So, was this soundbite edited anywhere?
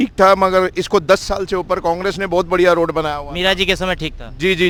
no; 0 cuts

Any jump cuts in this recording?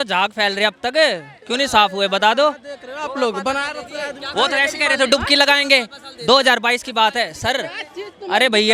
no; 0 cuts

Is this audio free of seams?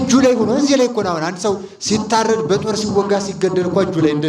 yes; 0 cuts

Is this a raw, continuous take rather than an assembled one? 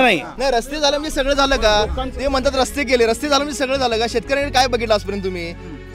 yes; 0 cuts

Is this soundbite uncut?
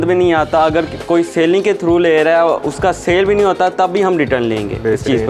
yes; 0 cuts

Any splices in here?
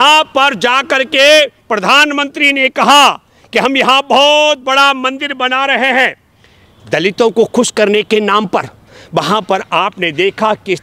no; 0 cuts

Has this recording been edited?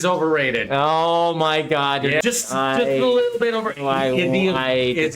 yes; 1 cut; at 2.2 s

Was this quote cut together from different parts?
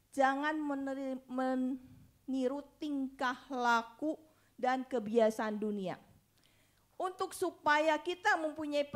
no; 0 cuts

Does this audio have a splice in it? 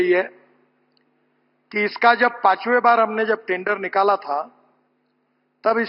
no; 0 cuts

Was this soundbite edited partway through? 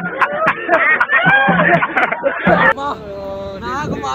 no; 0 cuts

